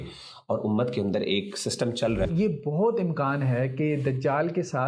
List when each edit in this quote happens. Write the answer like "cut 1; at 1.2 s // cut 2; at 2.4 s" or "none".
cut 1; at 2.3 s